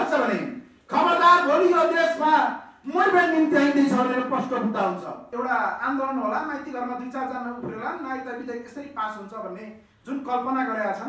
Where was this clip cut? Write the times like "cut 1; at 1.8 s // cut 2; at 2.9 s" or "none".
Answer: cut 1; at 5.3 s